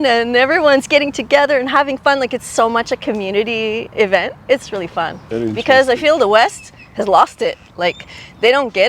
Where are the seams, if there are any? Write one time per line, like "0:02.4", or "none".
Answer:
0:05.2